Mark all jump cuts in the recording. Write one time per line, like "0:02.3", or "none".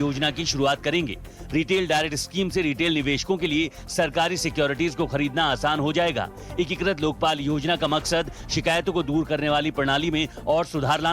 0:09.9